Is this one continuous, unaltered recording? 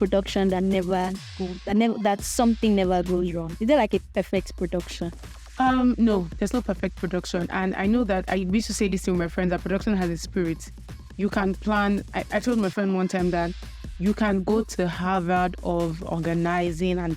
yes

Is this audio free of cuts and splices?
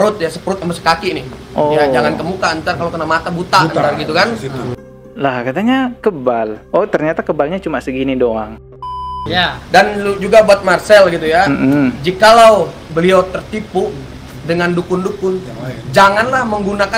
no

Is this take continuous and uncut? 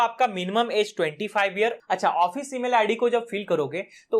no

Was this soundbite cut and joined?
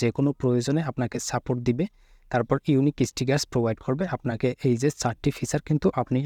no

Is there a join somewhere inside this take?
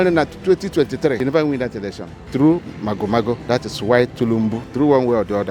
yes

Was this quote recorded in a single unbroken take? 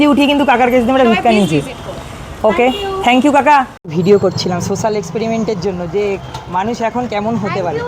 no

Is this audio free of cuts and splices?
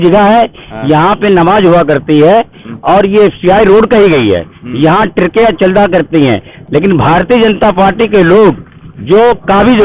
yes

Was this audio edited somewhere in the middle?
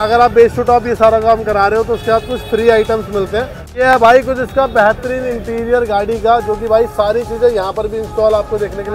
yes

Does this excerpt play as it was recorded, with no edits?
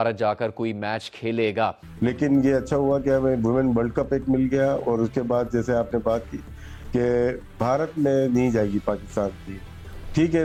yes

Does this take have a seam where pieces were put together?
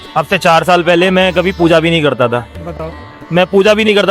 no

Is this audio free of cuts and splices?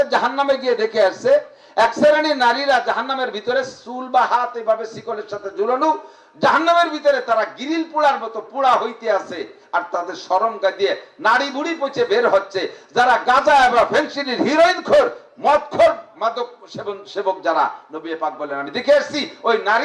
yes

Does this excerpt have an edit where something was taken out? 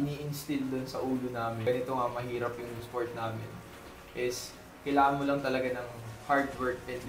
yes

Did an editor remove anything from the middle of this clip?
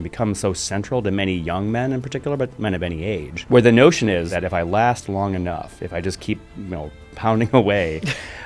yes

